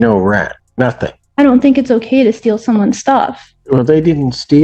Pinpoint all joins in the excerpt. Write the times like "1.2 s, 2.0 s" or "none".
0.9 s, 3.5 s